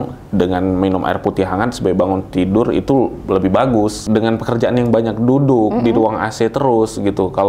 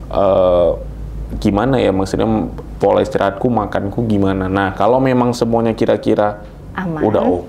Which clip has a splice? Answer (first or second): first